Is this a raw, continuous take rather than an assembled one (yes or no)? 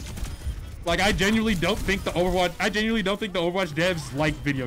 yes